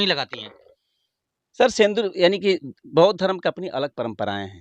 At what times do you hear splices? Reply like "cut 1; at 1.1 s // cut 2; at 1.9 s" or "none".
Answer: none